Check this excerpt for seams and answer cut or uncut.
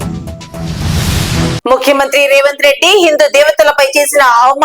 uncut